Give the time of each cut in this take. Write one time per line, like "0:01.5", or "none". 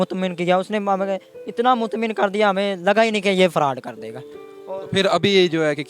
none